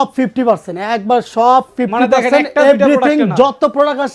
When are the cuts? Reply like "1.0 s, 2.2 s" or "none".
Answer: none